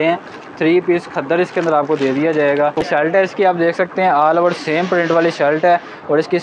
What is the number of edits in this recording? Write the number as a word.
one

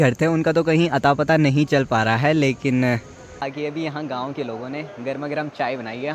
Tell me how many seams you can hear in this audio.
one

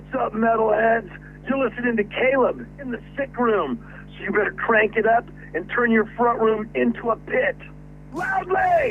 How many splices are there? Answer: zero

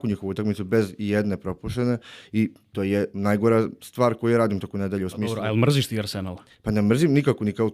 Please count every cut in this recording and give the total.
zero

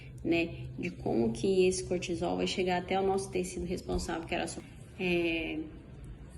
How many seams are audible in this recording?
one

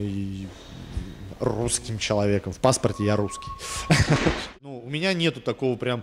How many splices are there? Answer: one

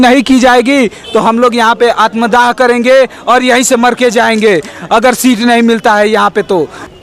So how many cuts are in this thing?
zero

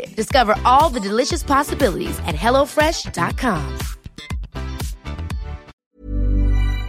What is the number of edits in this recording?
one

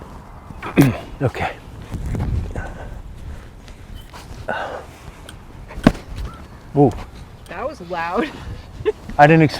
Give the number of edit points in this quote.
one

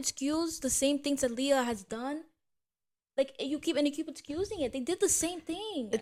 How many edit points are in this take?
zero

